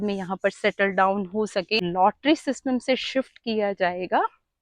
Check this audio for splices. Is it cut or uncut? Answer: cut